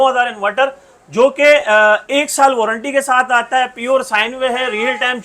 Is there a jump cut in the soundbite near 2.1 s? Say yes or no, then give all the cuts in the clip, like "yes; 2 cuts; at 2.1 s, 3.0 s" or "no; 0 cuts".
no; 0 cuts